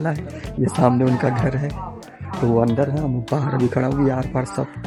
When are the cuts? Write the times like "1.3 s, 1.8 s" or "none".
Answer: none